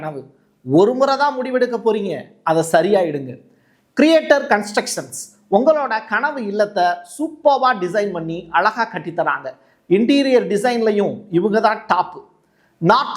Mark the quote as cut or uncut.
uncut